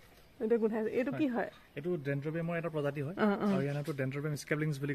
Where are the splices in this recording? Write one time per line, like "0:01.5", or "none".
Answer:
none